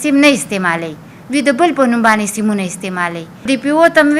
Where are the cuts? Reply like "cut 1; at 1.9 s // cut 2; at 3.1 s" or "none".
cut 1; at 3.3 s